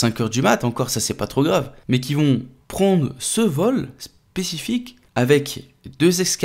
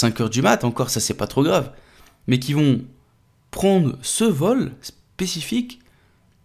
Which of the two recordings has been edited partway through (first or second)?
first